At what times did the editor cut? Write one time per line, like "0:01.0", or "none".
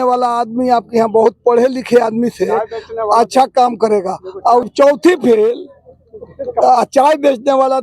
0:04.7